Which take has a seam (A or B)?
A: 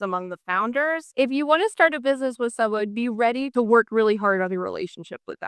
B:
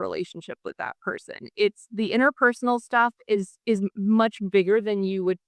A